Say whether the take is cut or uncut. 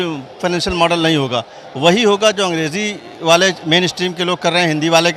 uncut